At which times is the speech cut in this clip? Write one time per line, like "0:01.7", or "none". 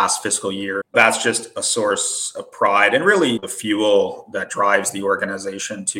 0:00.9
0:03.5